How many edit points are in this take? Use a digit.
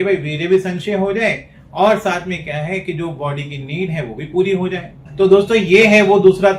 1